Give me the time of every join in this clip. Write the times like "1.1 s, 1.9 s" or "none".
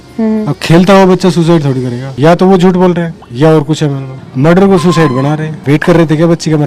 2.0 s, 4.1 s, 5.5 s